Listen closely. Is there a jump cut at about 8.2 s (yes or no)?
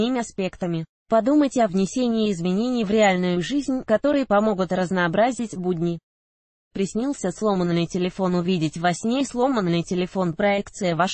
no